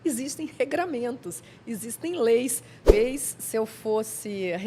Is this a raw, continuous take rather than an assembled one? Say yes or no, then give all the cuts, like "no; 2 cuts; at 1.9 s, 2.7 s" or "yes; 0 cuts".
no; 1 cut; at 2.9 s